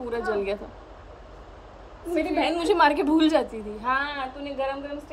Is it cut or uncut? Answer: uncut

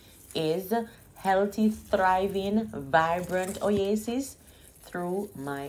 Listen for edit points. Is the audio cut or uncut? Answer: uncut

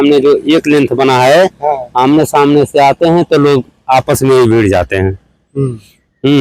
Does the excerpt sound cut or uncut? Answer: uncut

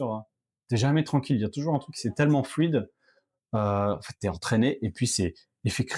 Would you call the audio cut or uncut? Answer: uncut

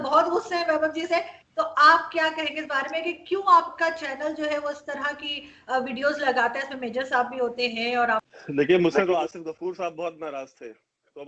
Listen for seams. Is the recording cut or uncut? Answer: cut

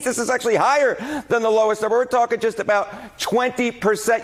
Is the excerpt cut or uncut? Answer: uncut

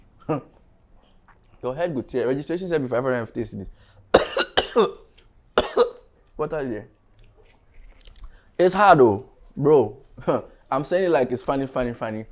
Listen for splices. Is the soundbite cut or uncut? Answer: uncut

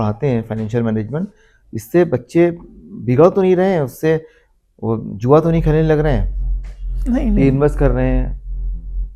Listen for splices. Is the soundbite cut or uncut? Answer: uncut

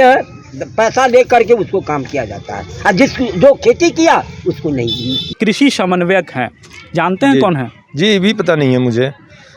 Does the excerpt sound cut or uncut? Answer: cut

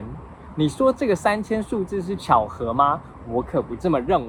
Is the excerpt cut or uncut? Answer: uncut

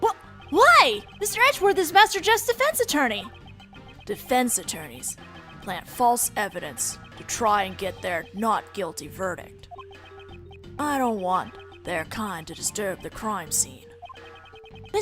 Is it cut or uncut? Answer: cut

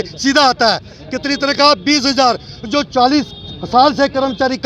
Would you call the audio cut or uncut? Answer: uncut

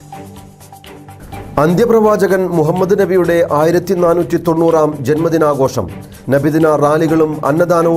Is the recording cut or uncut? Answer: cut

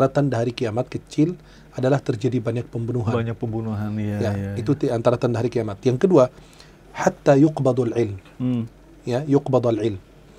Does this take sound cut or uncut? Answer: uncut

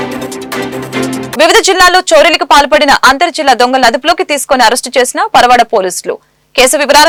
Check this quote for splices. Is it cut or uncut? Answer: uncut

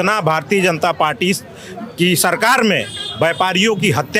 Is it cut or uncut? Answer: uncut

